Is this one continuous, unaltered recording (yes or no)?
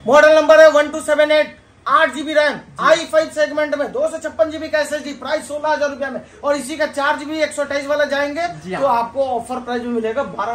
yes